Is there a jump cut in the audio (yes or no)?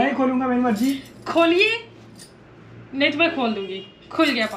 no